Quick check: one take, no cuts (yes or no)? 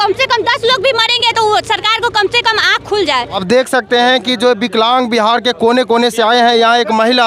no